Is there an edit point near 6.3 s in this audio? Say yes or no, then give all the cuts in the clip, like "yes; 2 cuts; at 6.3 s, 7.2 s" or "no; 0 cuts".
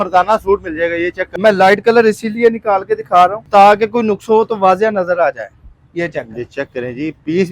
no; 2 cuts; at 1.2 s, 3.4 s